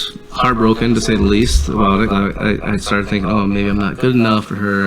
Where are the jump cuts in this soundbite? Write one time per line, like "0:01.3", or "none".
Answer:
0:02.1